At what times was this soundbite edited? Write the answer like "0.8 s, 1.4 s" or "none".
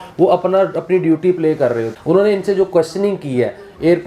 1.9 s